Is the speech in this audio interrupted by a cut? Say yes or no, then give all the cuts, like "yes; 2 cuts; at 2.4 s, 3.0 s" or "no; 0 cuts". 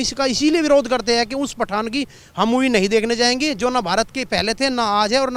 no; 0 cuts